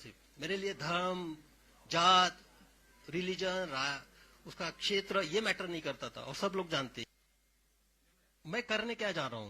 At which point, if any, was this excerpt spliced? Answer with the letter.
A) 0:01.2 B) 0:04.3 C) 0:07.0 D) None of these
C